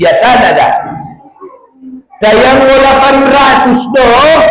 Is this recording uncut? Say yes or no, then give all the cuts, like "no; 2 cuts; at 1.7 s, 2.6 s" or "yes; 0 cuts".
yes; 0 cuts